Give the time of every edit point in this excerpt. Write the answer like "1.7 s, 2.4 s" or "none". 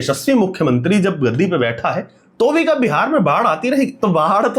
none